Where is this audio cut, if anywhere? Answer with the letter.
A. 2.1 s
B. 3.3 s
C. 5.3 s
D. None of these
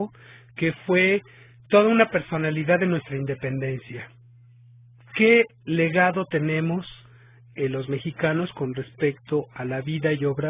C